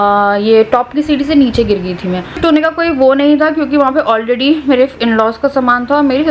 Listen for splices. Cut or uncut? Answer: cut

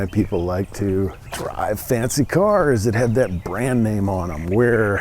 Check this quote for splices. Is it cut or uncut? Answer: cut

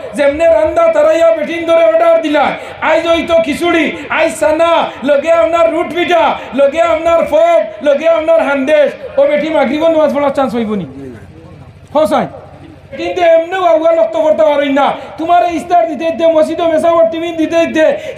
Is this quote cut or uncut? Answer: cut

